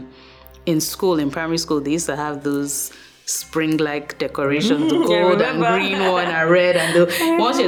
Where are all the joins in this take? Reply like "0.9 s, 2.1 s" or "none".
none